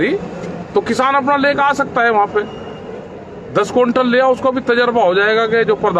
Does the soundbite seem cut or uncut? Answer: uncut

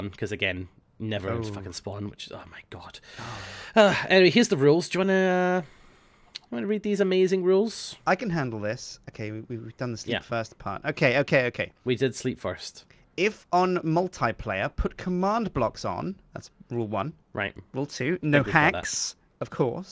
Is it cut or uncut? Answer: uncut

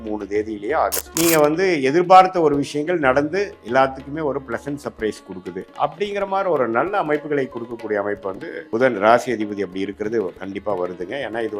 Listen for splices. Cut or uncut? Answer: cut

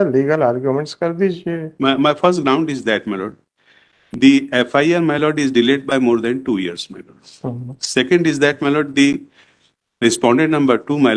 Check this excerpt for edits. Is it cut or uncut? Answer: cut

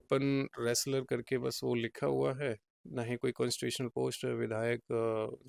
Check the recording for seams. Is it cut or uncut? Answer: uncut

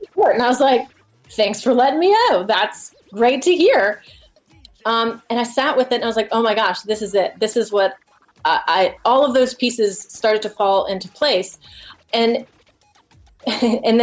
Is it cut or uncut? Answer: uncut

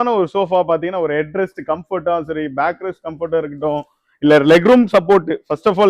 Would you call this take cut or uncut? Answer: uncut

